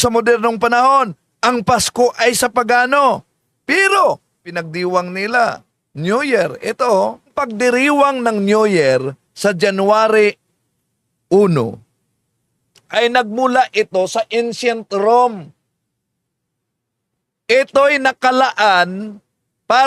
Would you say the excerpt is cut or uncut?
cut